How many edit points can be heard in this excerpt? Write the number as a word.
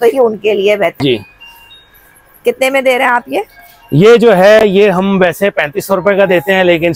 one